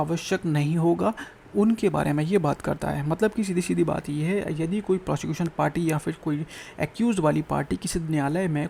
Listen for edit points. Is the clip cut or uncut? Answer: uncut